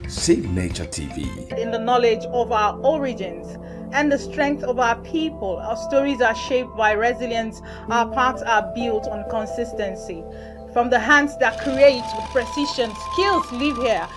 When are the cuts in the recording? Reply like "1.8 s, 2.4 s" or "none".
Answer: 1.6 s